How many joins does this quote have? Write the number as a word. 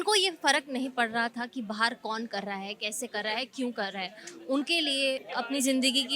one